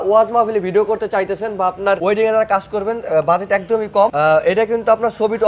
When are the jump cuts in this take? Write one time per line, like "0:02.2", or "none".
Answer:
none

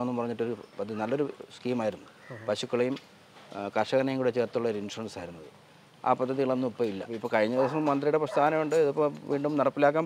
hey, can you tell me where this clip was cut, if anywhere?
0:07.1

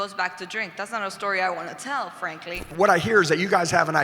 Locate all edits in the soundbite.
0:02.6

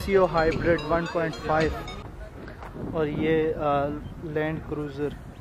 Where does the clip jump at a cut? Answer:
0:02.0

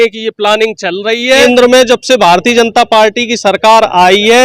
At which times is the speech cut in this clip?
0:01.4

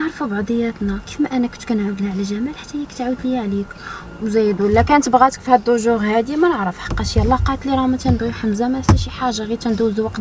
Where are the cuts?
none

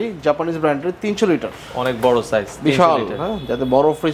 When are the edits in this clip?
none

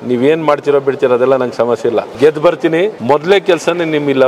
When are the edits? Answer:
0:02.1
0:03.0

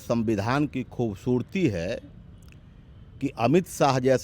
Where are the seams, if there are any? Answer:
none

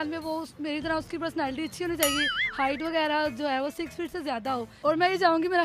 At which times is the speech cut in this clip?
0:04.7

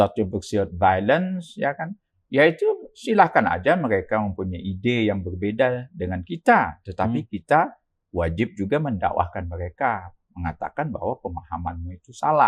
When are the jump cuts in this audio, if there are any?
none

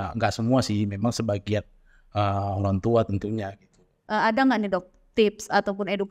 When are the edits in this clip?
0:04.0

